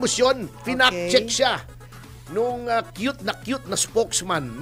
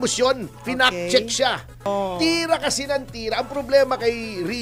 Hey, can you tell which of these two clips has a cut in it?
second; 1 cut; at 1.9 s

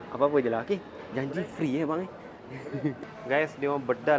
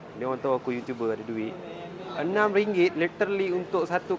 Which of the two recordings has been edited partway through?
first; 1 cut; at 3.0 s

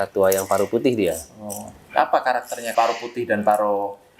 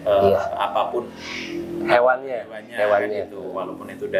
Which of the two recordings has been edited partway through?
first; 1 cut; at 2.7 s

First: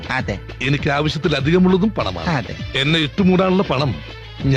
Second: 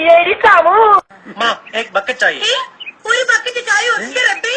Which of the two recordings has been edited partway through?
second; 1 cut; at 3.6 s

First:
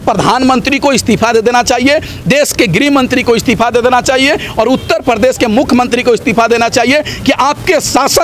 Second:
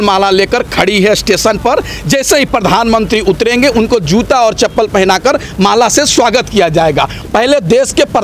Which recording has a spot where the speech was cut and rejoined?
second; 1 cut; at 7.1 s

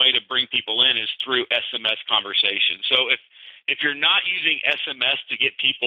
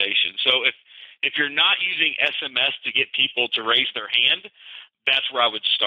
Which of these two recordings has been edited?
second; 1 cut; at 4.9 s

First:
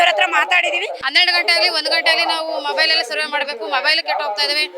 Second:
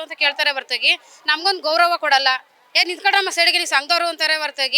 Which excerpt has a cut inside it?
first; 1 cut; at 1.0 s

